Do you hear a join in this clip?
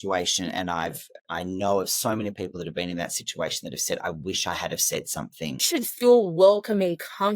yes; 1 cut; at 5.6 s

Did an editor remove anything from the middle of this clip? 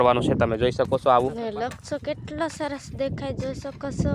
yes; 1 cut; at 1.4 s

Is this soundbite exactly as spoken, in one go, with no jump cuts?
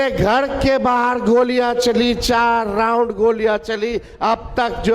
yes; 0 cuts

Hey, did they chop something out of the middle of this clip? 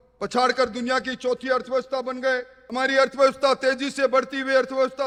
no; 0 cuts

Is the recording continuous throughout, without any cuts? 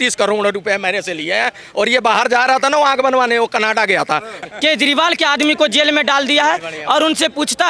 no; 1 cut; at 4.4 s

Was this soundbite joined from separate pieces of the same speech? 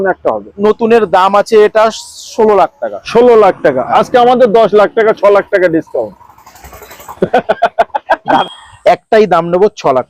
yes; 1 cut; at 8.4 s

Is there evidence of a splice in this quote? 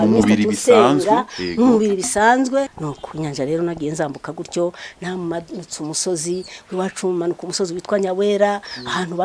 yes; 1 cut; at 2.7 s

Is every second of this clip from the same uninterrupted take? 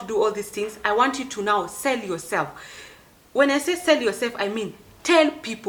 yes; 0 cuts

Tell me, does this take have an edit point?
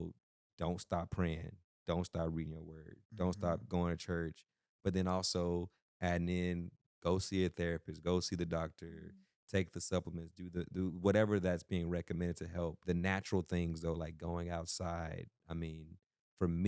yes; 1 cut; at 12.8 s

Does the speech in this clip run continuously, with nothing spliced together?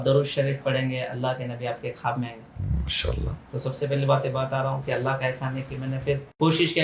yes; 0 cuts

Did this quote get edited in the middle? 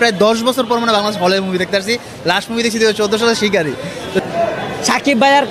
yes; 1 cut; at 4.2 s

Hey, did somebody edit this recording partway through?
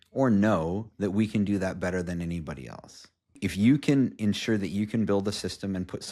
yes; 1 cut; at 3.4 s

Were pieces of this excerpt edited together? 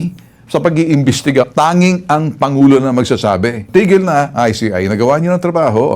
yes; 2 cuts; at 1.5 s, 3.7 s

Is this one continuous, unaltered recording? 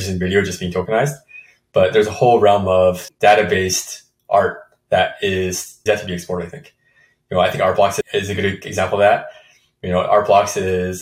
no; 3 cuts; at 3.1 s, 5.7 s, 8.0 s

